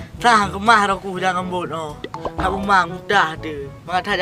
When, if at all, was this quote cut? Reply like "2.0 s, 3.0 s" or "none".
none

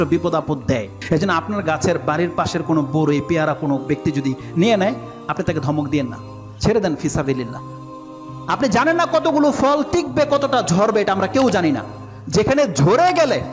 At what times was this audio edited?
1.0 s

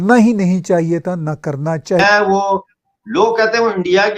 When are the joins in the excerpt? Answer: 2.0 s

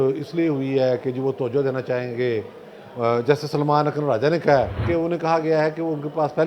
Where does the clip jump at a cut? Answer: 4.8 s

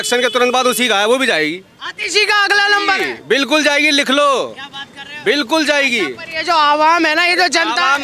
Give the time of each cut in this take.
none

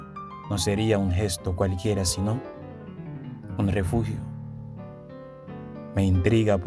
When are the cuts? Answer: 4.2 s, 5.5 s

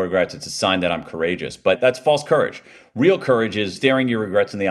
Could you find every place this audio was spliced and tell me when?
1.8 s, 3.7 s

